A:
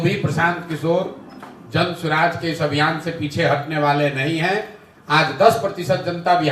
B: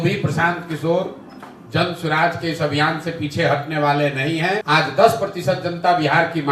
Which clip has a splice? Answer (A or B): B